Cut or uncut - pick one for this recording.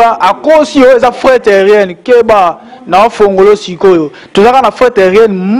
uncut